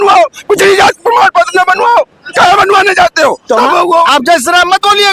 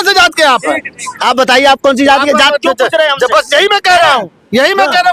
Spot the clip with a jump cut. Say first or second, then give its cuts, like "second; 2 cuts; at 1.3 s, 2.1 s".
first; 1 cut; at 4.1 s